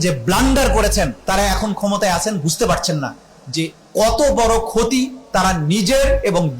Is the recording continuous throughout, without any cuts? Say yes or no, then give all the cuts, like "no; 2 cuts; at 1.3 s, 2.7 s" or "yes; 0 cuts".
no; 1 cut; at 1.2 s